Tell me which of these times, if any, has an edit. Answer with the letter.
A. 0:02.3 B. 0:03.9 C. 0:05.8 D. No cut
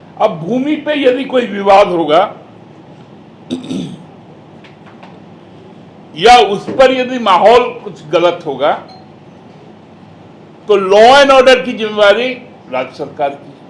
D